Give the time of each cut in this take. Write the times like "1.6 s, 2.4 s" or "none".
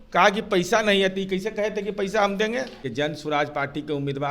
2.8 s